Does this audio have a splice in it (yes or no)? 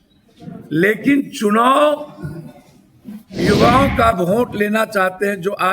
yes